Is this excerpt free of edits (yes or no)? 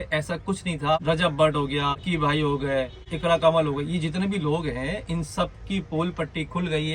no